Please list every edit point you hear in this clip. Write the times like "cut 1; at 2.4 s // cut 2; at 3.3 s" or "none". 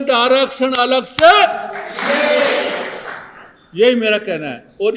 none